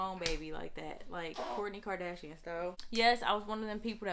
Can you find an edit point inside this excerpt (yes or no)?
yes